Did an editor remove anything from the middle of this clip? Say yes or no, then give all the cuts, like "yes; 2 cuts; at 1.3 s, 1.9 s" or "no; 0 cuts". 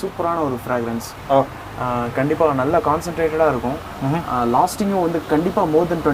no; 0 cuts